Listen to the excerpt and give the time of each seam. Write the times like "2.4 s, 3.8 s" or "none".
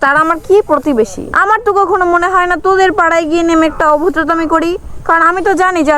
1.2 s

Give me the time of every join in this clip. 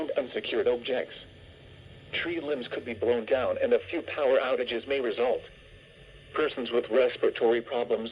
6.2 s

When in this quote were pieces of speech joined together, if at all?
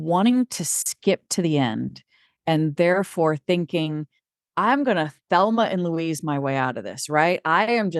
none

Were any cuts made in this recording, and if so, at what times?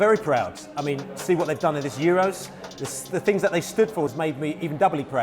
4.1 s

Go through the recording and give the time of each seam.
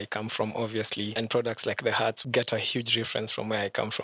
1.1 s, 2.2 s

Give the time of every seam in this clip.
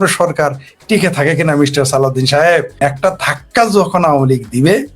2.8 s

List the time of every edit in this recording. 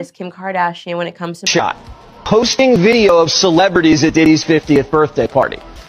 1.5 s

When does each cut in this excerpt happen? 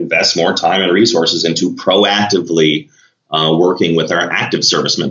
none

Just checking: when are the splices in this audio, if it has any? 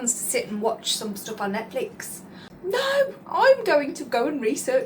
2.5 s

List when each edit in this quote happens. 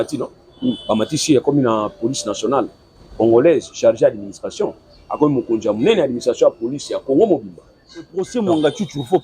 8.2 s

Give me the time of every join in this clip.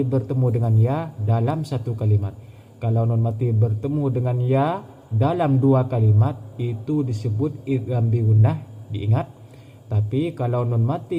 none

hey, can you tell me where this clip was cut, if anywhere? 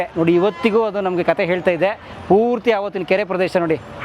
none

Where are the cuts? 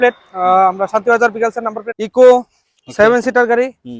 1.8 s

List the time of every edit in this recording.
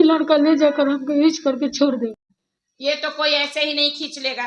2.2 s

